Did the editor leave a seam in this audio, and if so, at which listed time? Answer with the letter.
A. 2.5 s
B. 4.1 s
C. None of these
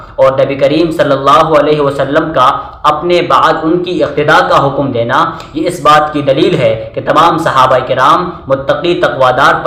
C